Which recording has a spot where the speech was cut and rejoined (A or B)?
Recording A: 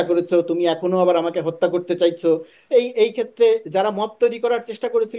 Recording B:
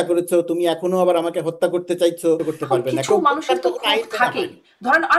B